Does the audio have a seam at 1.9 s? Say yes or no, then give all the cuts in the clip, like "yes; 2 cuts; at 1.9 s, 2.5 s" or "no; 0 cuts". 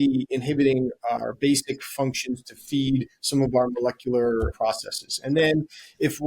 no; 1 cut; at 4.5 s